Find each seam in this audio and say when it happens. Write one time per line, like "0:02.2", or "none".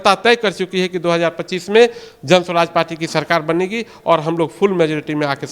none